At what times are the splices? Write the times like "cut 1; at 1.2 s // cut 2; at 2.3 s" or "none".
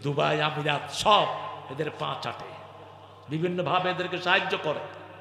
none